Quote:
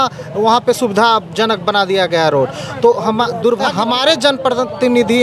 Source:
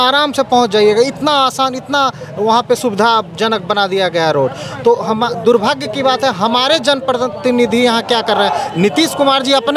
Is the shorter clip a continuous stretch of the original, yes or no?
no